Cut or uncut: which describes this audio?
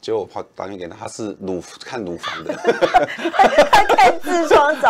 uncut